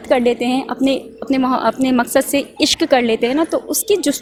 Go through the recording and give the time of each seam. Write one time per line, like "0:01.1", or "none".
none

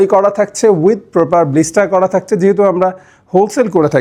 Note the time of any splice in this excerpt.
none

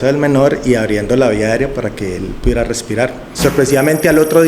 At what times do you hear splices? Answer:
0:03.3

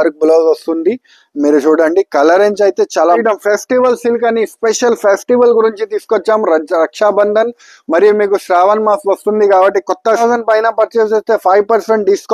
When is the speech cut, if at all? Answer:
0:03.2
0:10.2

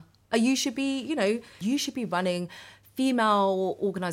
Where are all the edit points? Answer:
0:01.6

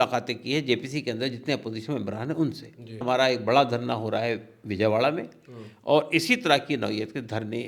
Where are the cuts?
0:03.0

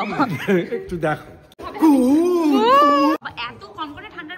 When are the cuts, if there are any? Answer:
0:01.6
0:03.2

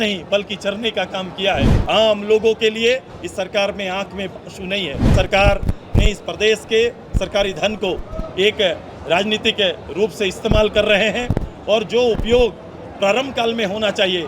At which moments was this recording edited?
0:01.7
0:05.1

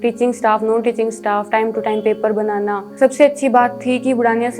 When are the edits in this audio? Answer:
0:02.9

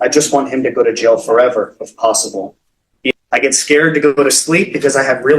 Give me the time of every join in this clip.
0:03.1

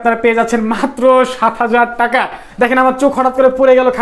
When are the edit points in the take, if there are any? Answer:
0:02.4

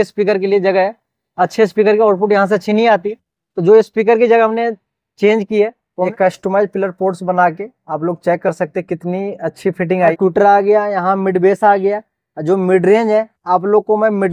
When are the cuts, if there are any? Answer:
0:06.1
0:10.2

